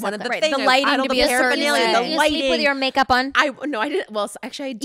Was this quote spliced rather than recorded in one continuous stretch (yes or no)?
no